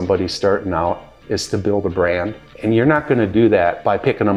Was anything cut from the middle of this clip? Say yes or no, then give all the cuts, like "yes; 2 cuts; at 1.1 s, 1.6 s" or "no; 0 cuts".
no; 0 cuts